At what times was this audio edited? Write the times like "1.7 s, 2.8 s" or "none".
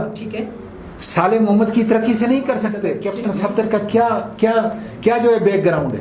3.1 s